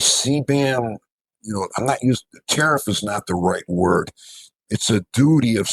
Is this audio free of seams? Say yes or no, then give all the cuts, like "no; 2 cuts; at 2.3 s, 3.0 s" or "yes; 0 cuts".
no; 1 cut; at 4.5 s